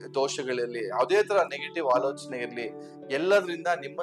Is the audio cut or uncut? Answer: uncut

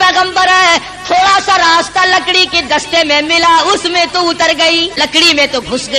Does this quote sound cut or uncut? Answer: cut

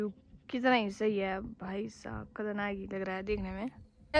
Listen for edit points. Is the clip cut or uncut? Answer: uncut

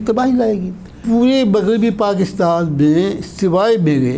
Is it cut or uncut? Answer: cut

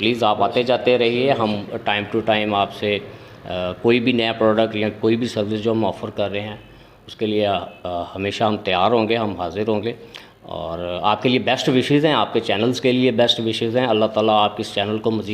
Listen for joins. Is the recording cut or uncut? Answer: uncut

